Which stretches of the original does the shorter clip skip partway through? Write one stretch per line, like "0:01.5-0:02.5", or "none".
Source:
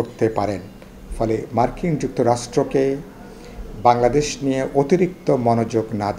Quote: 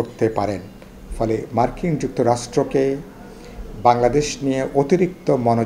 none